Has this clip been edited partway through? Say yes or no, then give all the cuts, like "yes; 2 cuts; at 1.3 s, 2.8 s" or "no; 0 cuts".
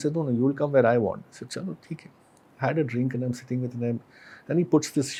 no; 0 cuts